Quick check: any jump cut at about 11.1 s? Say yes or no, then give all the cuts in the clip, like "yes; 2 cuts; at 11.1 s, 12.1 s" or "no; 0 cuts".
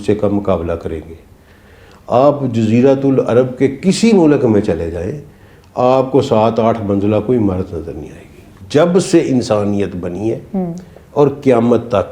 no; 1 cut; at 8.5 s